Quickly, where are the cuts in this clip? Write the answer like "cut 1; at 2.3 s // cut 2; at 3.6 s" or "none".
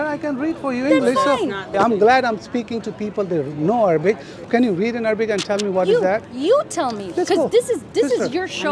cut 1; at 1.7 s // cut 2; at 4.3 s